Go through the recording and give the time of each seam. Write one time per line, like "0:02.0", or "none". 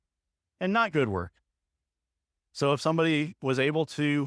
none